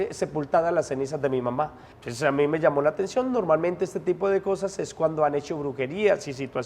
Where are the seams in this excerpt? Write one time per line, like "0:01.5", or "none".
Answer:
0:01.9